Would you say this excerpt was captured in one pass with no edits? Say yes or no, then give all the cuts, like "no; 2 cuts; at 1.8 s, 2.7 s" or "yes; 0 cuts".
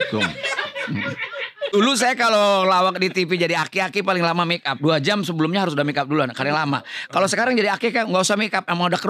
no; 1 cut; at 1.7 s